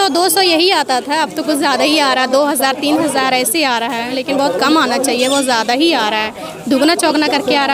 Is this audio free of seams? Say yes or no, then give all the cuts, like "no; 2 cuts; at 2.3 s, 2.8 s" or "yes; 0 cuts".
yes; 0 cuts